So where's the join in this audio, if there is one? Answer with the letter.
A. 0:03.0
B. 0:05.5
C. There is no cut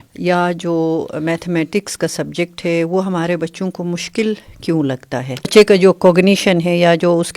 B